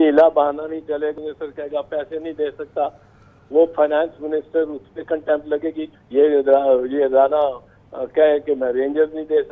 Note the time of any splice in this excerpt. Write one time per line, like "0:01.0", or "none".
0:01.1
0:05.8

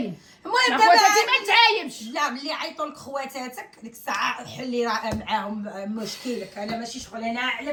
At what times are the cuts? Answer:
none

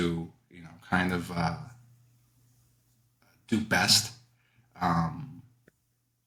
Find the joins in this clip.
none

